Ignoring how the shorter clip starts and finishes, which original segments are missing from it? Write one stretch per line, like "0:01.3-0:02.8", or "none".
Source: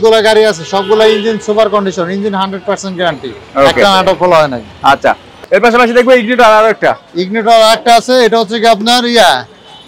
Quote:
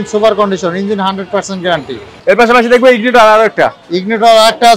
0:03.4-0:05.3